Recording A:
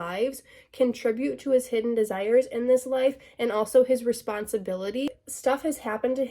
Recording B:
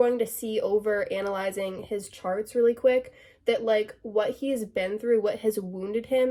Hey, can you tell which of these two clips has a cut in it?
A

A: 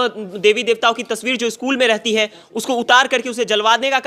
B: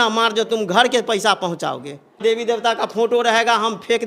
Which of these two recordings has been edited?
B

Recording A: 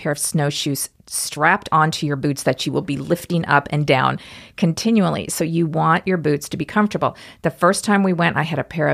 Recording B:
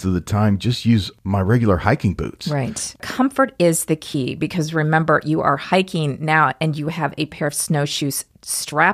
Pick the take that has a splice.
B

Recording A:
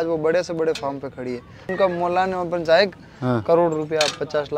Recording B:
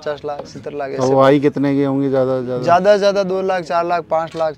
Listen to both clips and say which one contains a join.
A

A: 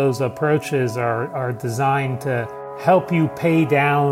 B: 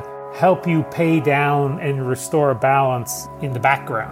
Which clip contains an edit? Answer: B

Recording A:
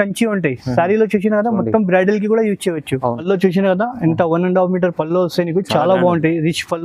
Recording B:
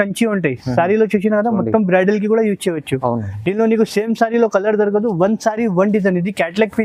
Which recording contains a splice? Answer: A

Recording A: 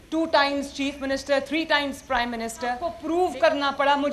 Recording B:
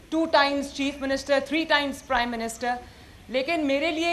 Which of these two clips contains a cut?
A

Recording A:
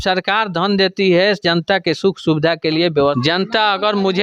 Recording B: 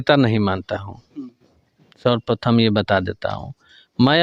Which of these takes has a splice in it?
A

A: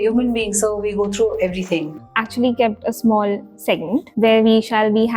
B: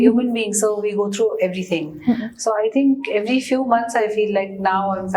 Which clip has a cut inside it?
A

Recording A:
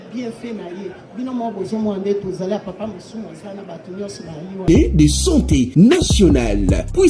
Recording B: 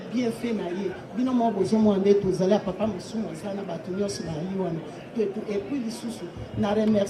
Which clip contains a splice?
A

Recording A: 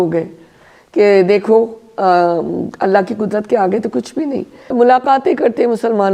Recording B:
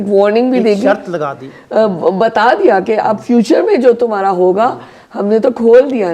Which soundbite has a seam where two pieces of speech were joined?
A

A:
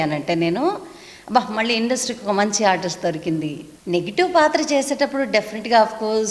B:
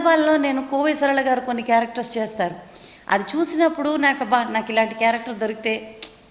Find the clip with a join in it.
A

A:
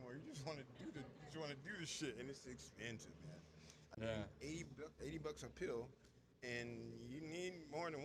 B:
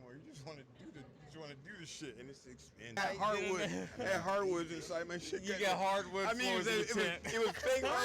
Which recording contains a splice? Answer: B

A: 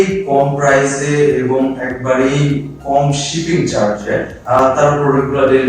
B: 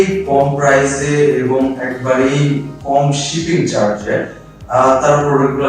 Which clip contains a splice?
A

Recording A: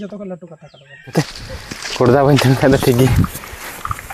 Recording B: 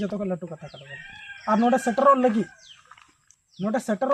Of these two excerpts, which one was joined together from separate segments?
A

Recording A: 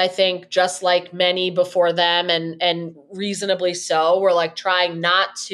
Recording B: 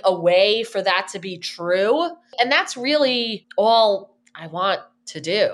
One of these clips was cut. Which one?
B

